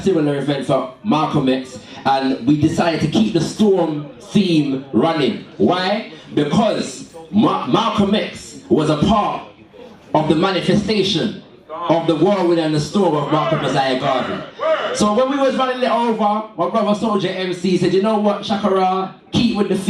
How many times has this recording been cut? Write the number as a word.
zero